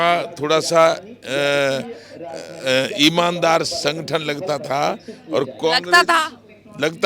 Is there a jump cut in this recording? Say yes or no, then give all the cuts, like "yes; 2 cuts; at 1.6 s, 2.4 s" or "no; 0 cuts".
no; 0 cuts